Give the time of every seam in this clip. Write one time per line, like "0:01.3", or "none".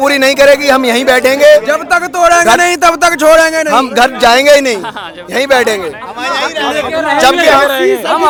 none